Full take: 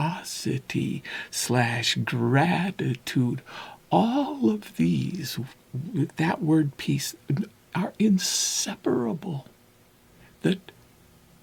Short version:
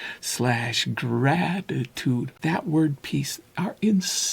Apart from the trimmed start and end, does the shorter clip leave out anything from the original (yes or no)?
yes